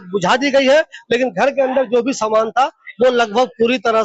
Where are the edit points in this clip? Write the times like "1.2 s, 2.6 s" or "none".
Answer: none